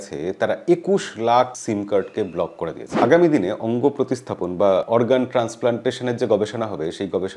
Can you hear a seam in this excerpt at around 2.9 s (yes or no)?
yes